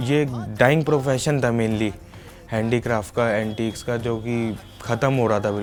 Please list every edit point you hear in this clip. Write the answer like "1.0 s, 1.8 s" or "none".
none